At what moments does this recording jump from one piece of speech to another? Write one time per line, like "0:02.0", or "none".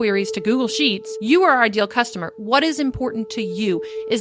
0:01.1

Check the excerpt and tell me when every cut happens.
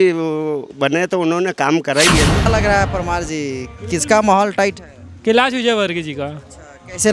0:02.5

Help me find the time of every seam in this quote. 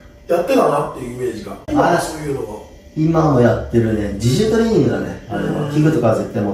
0:01.7

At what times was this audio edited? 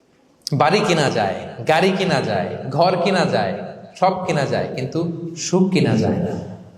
none

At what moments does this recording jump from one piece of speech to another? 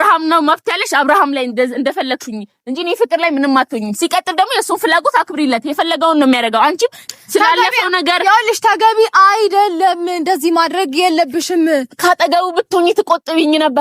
0:07.0

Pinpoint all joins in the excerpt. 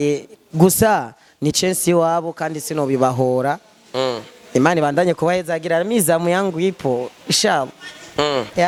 none

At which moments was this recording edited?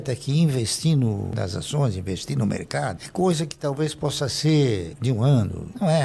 none

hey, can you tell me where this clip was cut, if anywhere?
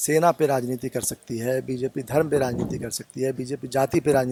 none

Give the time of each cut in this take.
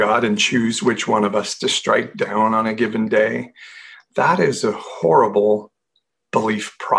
none

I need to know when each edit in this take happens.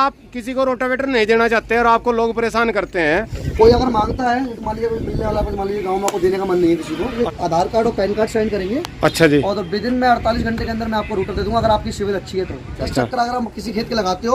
0:03.4
0:07.1
0:12.9

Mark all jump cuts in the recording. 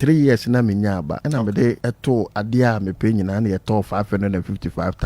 0:01.2
0:01.8

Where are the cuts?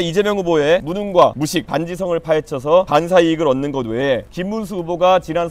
0:00.9
0:01.5
0:02.9
0:04.3

